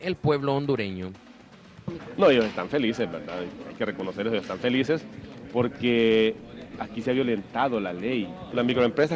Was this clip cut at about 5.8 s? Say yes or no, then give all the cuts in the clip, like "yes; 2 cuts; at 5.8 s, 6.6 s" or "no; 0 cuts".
yes; 1 cut; at 5.8 s